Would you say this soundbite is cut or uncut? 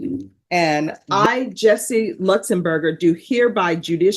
cut